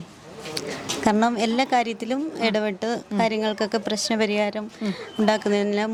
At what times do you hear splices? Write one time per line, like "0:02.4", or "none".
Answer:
none